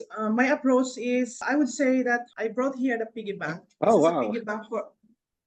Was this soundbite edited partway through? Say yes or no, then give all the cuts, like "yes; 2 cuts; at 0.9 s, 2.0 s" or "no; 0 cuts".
yes; 3 cuts; at 1.4 s, 2.3 s, 3.6 s